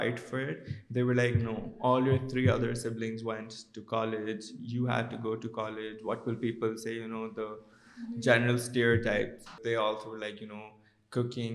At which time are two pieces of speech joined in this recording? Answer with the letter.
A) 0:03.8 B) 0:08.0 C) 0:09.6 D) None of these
C